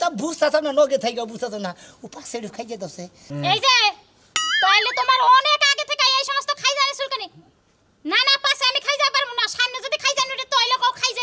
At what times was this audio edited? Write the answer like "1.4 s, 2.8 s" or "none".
none

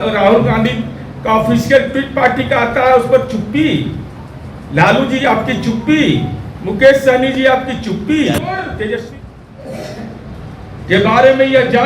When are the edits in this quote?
8.7 s

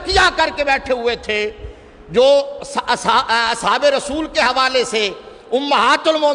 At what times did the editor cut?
none

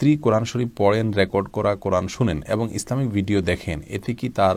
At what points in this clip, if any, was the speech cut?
none

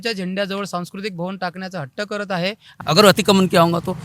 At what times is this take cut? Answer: 2.7 s

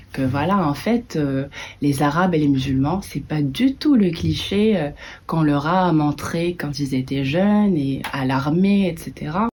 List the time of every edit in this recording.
none

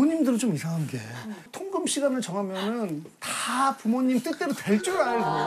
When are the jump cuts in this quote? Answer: 1.6 s

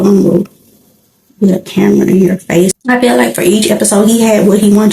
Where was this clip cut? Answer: 2.7 s

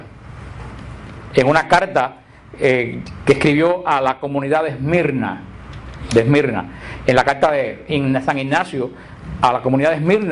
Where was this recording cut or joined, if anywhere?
8.2 s

